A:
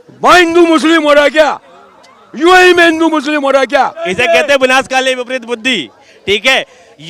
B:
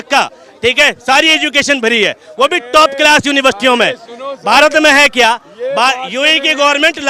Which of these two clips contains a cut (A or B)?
A